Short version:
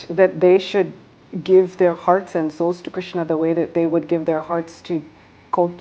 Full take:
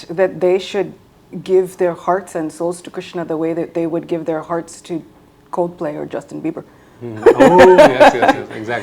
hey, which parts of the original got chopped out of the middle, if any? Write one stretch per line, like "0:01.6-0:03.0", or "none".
none